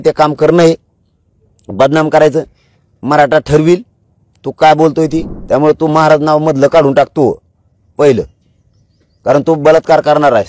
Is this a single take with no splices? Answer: no; 1 cut; at 5.3 s

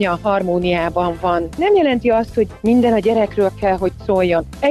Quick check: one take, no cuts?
no; 1 cut; at 1.6 s

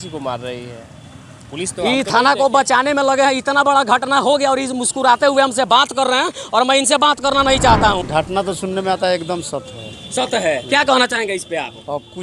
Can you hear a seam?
yes; 1 cut; at 8.0 s

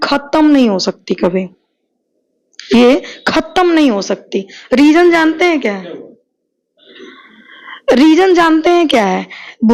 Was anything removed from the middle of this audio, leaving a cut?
no; 0 cuts

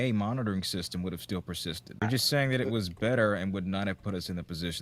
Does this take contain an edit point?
yes; 1 cut; at 2.0 s

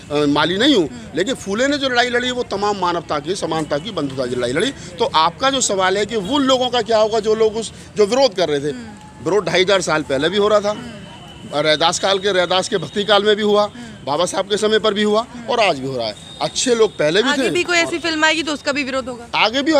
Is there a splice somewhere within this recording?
no; 0 cuts

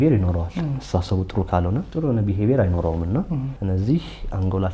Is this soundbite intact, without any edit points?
no; 2 cuts; at 1.9 s, 3.5 s

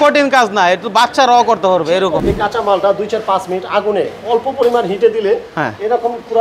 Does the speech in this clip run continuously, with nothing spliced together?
no; 1 cut; at 2.2 s

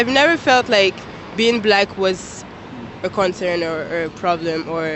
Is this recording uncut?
yes; 0 cuts

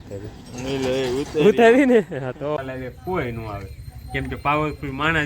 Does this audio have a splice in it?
yes; 1 cut; at 2.6 s

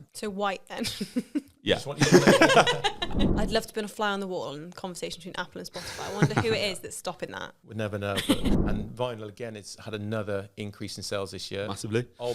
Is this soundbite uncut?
no; 2 cuts; at 3.2 s, 8.5 s

